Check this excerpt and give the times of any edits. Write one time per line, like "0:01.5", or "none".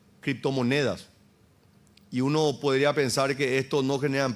none